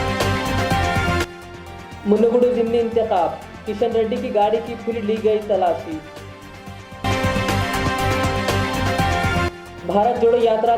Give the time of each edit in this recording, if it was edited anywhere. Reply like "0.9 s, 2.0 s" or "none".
1.2 s